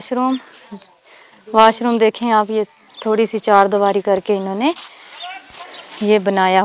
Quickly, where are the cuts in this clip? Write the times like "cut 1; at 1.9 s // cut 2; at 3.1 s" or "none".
none